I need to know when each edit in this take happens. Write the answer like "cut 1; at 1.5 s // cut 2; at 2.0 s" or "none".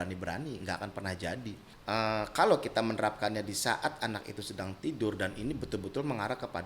cut 1; at 1.7 s